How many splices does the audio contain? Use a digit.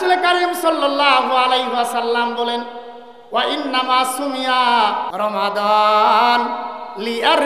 1